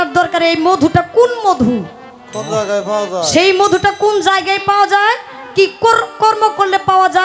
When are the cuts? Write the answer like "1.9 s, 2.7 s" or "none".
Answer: none